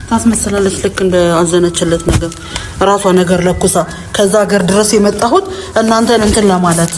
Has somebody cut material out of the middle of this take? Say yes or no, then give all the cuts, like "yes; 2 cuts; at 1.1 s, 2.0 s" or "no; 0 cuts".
no; 0 cuts